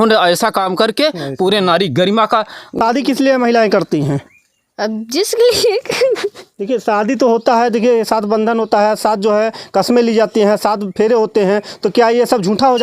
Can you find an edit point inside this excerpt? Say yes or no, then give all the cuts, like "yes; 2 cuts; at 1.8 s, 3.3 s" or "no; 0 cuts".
yes; 1 cut; at 2.8 s